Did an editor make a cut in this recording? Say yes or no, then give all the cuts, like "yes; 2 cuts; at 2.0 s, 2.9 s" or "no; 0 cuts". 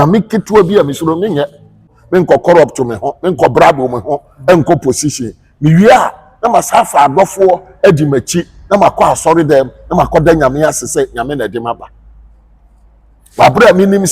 yes; 1 cut; at 2.0 s